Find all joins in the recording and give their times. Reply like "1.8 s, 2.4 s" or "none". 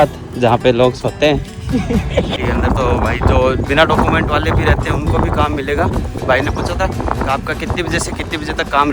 2.3 s, 6.2 s